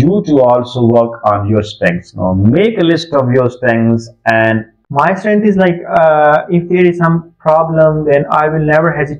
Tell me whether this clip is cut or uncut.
cut